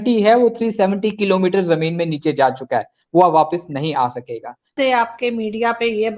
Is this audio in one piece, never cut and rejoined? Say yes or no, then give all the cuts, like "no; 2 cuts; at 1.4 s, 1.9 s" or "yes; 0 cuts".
no; 1 cut; at 4.7 s